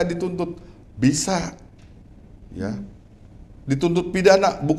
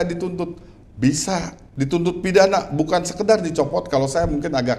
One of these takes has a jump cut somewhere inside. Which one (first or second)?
second